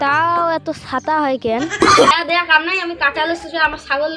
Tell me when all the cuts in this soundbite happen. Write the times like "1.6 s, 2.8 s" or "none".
2.1 s